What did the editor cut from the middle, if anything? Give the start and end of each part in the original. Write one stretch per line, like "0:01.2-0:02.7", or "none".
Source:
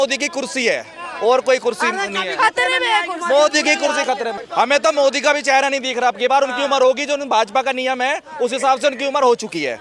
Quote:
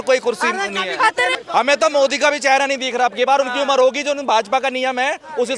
0:02.8-0:04.4